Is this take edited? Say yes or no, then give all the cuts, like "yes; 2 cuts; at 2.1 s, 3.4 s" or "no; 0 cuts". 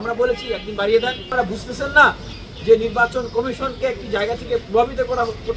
yes; 1 cut; at 1.3 s